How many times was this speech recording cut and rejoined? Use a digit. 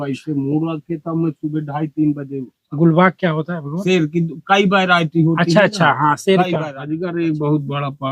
1